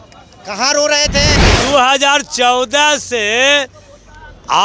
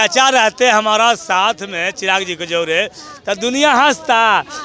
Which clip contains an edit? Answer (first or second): first